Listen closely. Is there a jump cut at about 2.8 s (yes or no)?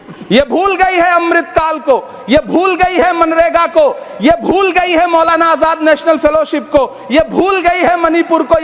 no